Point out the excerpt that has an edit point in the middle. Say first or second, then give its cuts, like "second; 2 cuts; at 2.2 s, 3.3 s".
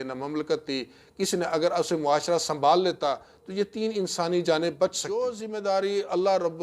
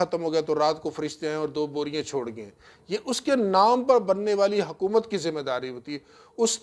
first; 1 cut; at 5.0 s